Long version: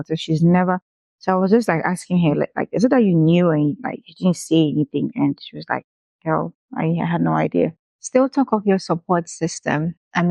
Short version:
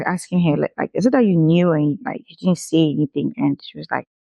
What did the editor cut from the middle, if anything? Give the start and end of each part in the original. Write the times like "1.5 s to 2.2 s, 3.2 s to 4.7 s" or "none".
none